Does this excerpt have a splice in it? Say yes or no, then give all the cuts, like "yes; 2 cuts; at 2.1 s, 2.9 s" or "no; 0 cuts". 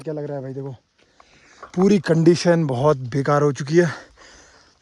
no; 0 cuts